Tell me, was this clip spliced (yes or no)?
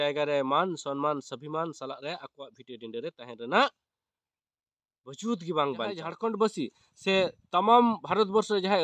yes